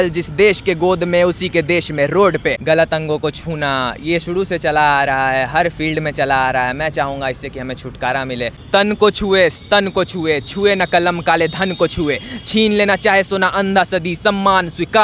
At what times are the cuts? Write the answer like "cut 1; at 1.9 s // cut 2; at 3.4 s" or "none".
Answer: cut 1; at 2.6 s // cut 2; at 8.6 s